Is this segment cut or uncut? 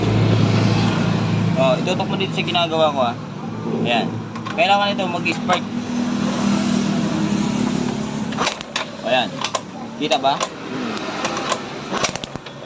uncut